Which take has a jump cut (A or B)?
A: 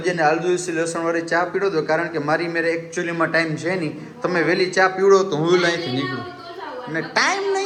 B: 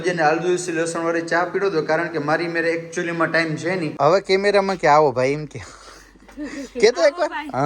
B